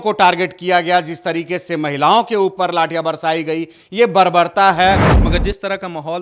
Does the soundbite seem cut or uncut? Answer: cut